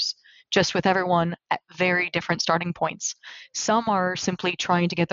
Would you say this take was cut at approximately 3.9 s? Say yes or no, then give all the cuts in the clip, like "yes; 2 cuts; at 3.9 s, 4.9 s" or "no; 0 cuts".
no; 0 cuts